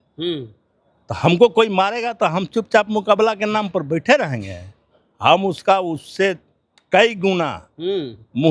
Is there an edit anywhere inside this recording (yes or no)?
no